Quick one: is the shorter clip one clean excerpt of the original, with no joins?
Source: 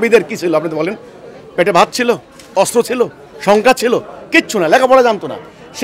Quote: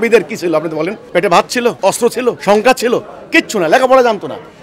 no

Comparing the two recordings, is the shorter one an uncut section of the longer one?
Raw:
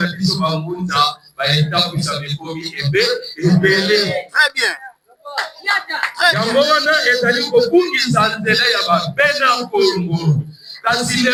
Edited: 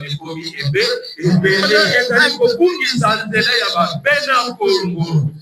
no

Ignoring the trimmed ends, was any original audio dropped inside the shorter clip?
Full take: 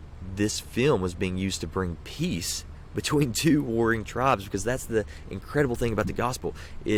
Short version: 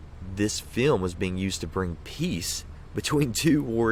no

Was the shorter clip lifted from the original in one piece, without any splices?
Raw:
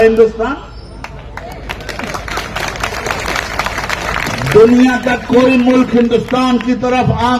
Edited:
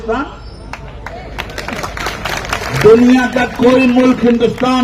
no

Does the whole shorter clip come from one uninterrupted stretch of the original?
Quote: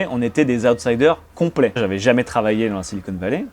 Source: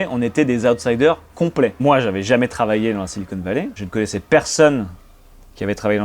no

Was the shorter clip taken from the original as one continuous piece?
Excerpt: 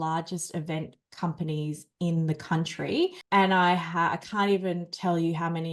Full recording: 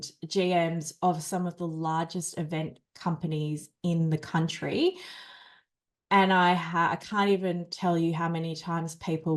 no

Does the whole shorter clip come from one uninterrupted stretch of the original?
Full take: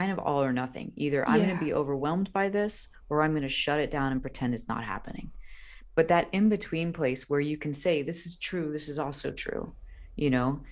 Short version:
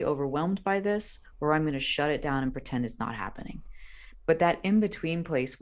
yes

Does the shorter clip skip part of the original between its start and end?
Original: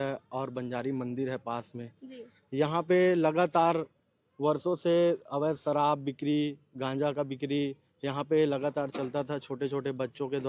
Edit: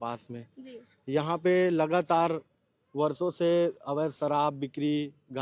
no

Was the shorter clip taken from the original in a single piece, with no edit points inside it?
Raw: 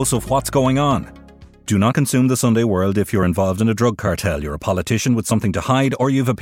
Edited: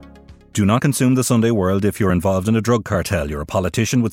yes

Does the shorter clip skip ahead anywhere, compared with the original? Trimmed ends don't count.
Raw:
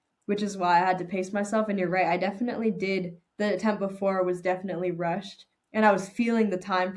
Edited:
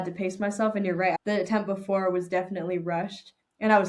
yes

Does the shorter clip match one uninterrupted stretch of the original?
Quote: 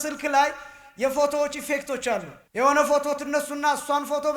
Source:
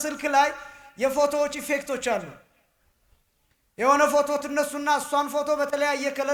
no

